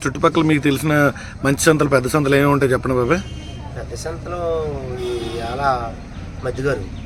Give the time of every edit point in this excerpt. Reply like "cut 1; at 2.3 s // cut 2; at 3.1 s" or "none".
none